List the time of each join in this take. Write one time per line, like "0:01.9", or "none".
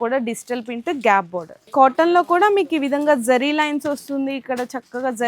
0:01.6